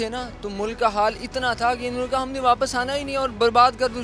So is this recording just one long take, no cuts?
yes; 0 cuts

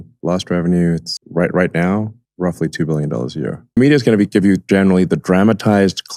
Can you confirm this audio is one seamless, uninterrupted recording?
yes; 0 cuts

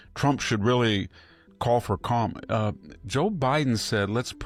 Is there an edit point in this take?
no; 0 cuts

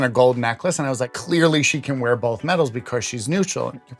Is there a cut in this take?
yes; 1 cut; at 1.2 s

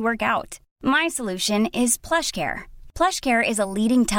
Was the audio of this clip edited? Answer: no; 0 cuts

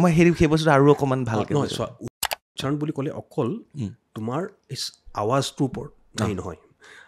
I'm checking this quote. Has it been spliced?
yes; 1 cut; at 2.3 s

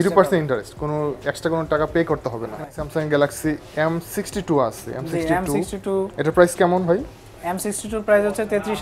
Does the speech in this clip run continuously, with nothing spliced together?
yes; 0 cuts

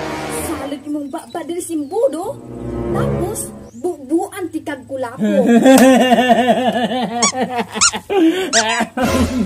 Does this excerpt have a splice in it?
yes; 2 cuts; at 2.4 s, 3.3 s

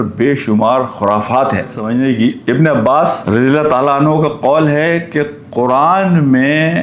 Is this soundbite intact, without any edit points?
no; 1 cut; at 1.8 s

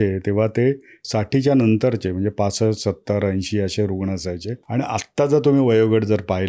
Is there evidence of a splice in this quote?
yes; 2 cuts; at 1.0 s, 4.5 s

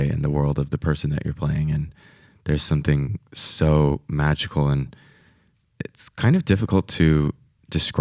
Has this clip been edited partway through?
no; 0 cuts

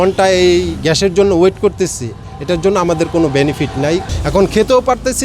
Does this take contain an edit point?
yes; 1 cut; at 4.1 s

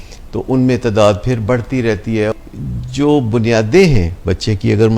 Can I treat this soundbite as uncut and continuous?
no; 1 cut; at 2.3 s

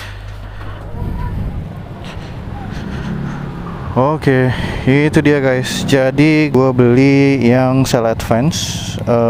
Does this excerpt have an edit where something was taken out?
no; 0 cuts

